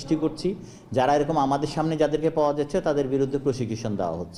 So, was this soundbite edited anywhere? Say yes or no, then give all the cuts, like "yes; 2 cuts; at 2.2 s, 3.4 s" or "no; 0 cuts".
no; 0 cuts